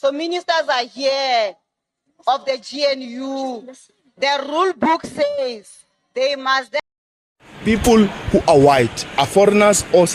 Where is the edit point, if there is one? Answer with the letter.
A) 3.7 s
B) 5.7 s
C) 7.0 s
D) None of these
C